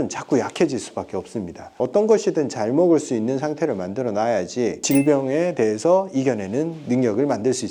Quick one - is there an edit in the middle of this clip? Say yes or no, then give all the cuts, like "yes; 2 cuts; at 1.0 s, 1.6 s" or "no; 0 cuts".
yes; 2 cuts; at 1.8 s, 4.8 s